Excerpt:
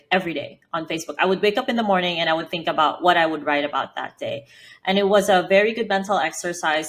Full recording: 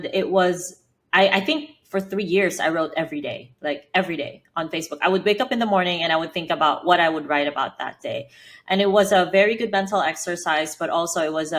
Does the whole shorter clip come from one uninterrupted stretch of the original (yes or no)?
yes